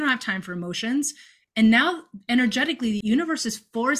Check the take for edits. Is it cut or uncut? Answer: cut